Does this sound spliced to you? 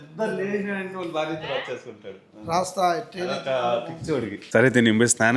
no; 0 cuts

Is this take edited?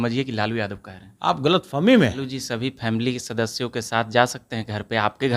yes; 1 cut; at 2.3 s

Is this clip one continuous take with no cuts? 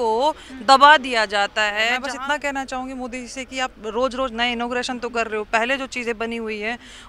no; 1 cut; at 2.0 s

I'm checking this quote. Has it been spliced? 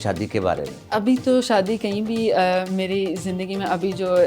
no; 0 cuts

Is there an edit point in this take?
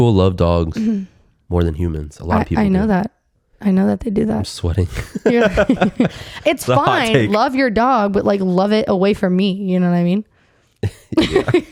no; 0 cuts

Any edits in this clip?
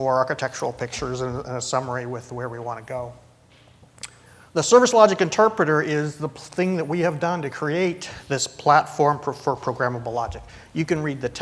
yes; 1 cut; at 7.5 s

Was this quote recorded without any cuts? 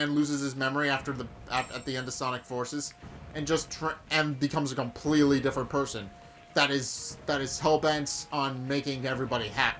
yes; 0 cuts

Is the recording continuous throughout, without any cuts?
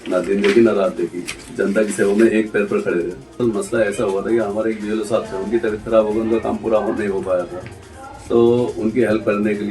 no; 1 cut; at 3.2 s

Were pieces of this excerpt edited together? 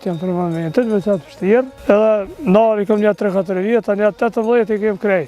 yes; 1 cut; at 1.7 s

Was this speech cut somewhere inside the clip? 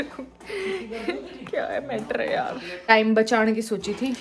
yes; 1 cut; at 2.9 s

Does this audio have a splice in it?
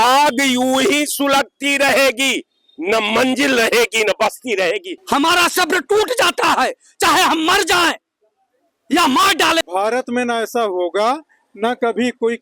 yes; 2 cuts; at 5.0 s, 9.6 s

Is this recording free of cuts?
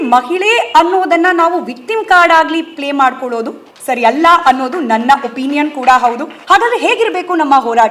yes; 0 cuts

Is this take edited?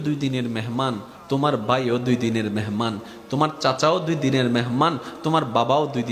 yes; 1 cut; at 1.1 s

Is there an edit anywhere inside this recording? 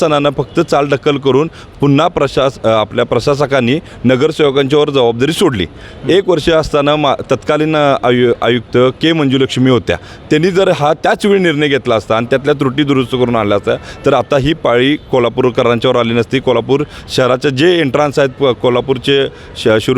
no; 0 cuts

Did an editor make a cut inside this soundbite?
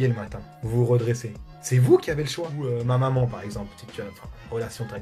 yes; 1 cut; at 2.5 s

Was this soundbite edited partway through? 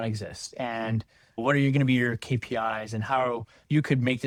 no; 0 cuts

